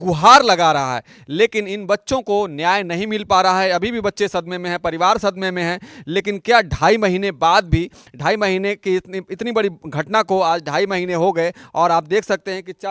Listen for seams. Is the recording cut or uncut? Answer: uncut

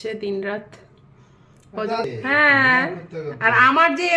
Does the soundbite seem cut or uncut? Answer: cut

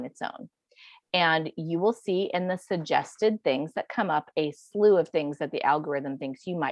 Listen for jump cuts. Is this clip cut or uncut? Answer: uncut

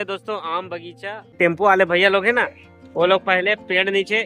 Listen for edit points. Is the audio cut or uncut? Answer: cut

